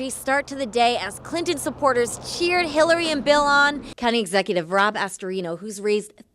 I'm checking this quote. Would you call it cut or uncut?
cut